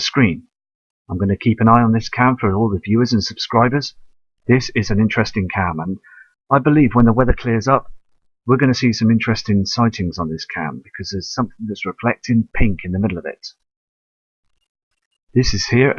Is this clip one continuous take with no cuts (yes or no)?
yes